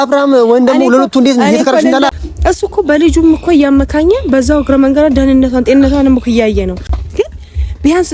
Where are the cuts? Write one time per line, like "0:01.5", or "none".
0:02.1
0:06.9